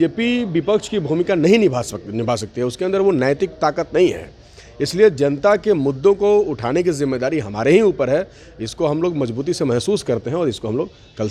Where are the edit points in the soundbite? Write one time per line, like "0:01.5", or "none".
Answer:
none